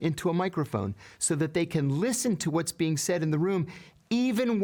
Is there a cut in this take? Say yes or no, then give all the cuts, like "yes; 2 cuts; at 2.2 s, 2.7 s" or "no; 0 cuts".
no; 0 cuts